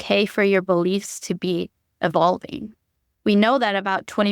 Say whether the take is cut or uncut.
cut